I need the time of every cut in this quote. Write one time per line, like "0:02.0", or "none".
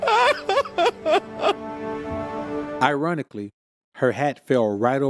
0:02.8